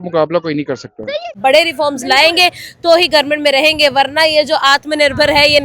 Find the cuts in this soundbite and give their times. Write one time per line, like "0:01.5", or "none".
0:01.4